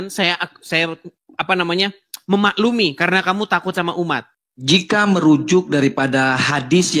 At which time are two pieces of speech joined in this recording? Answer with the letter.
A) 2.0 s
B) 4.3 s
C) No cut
B